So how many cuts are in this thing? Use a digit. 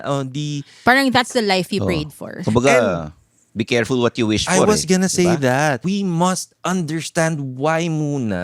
1